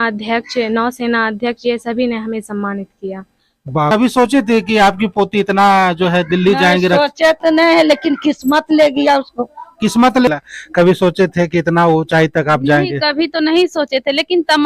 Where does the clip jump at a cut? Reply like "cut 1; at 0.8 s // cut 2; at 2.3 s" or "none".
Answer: cut 1; at 3.9 s // cut 2; at 10.3 s

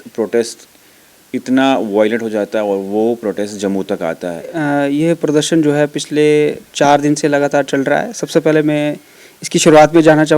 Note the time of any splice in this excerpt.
cut 1; at 4.6 s

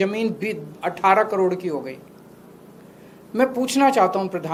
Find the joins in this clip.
none

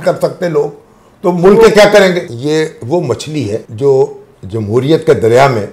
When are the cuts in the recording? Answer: cut 1; at 2.2 s // cut 2; at 3.7 s

